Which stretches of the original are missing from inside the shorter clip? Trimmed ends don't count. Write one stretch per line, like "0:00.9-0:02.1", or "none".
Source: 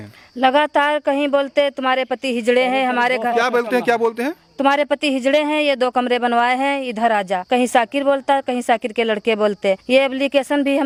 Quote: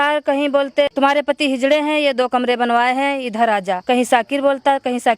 0:01.7-0:04.6